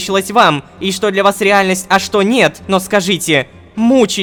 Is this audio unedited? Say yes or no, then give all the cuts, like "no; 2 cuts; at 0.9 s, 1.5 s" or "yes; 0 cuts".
yes; 0 cuts